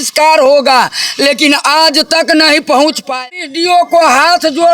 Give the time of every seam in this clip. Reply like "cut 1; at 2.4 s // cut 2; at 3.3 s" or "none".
cut 1; at 3.3 s

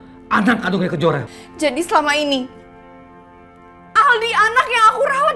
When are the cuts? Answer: cut 1; at 1.3 s

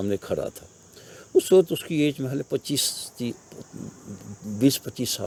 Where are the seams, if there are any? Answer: none

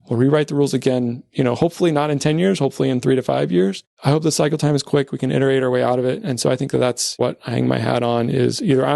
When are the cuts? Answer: cut 1; at 3.8 s // cut 2; at 7.2 s

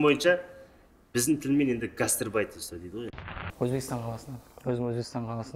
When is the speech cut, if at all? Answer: cut 1; at 3.1 s

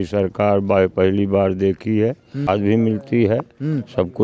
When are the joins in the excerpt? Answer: cut 1; at 2.5 s

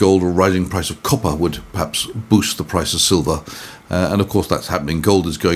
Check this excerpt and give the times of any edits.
none

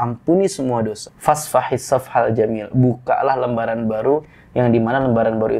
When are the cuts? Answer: cut 1; at 1.1 s

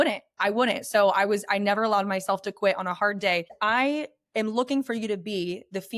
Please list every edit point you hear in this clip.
cut 1; at 3.5 s

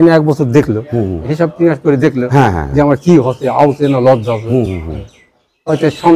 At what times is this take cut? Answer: cut 1; at 1.3 s

